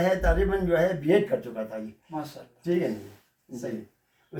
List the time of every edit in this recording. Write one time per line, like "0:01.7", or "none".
none